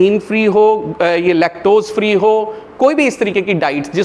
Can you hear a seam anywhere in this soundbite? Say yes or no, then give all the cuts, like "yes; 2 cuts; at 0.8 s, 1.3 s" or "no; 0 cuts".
no; 0 cuts